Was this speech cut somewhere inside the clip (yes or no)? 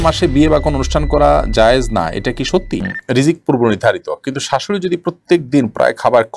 yes